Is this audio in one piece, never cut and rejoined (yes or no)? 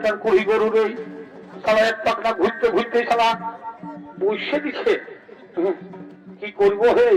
yes